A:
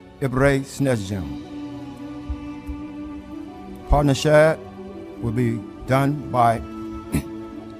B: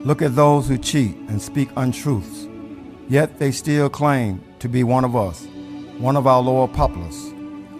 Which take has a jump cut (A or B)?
A